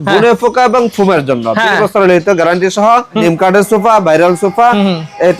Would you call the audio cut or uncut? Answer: cut